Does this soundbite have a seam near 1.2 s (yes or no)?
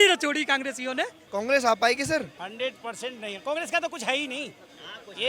yes